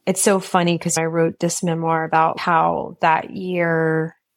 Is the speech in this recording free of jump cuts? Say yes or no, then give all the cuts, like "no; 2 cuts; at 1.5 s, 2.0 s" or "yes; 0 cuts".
no; 2 cuts; at 1.0 s, 2.4 s